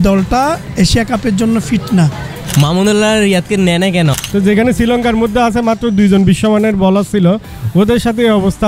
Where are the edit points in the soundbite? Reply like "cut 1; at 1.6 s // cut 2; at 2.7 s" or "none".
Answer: cut 1; at 2.4 s // cut 2; at 4.2 s